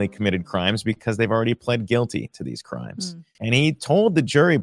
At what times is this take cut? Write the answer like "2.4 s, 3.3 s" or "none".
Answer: 3.2 s